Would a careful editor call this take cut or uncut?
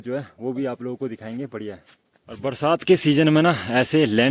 uncut